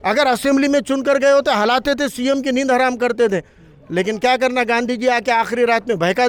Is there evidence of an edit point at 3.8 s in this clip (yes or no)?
no